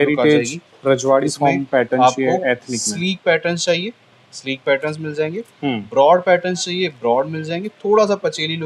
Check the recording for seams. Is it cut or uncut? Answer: uncut